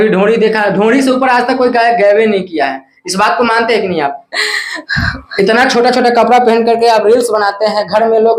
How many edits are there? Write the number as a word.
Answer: zero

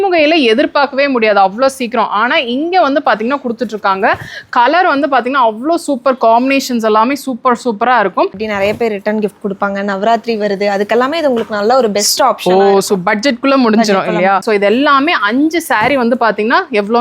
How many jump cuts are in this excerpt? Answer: two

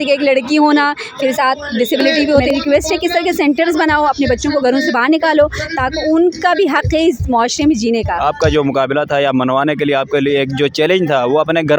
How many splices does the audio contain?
two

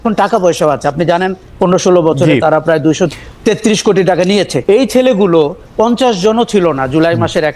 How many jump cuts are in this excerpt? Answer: one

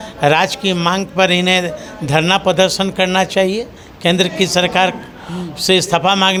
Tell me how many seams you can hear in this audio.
zero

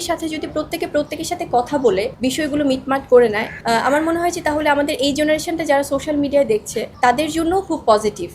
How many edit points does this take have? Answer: three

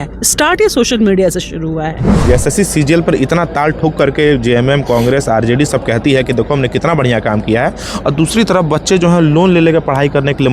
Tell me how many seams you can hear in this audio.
one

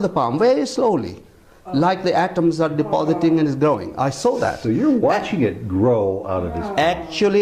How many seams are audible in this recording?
zero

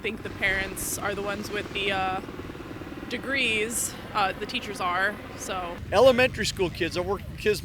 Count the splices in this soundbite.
one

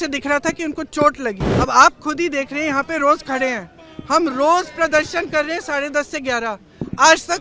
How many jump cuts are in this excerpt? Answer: one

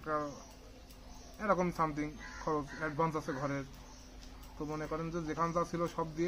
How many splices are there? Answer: zero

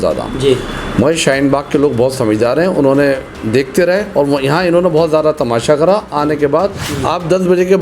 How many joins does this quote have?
one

